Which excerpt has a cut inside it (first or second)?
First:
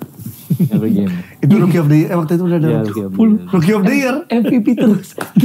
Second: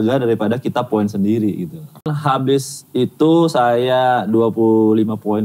second